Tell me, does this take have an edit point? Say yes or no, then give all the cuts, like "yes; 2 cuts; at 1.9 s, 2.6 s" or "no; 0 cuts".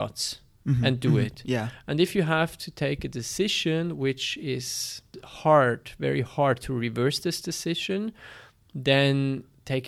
yes; 1 cut; at 5.2 s